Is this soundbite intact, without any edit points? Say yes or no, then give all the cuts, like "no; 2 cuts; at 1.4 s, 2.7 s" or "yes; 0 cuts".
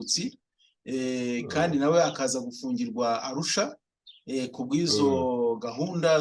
yes; 0 cuts